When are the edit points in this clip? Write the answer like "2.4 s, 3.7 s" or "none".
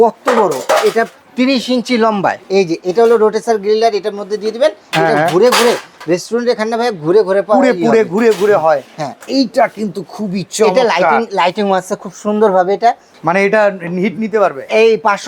1.2 s, 2.4 s, 9.2 s, 13.1 s